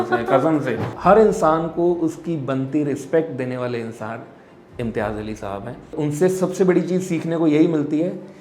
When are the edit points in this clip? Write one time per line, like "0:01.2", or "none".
0:00.9
0:05.9